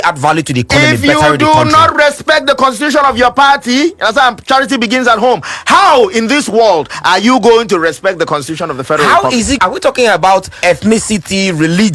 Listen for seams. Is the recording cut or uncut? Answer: cut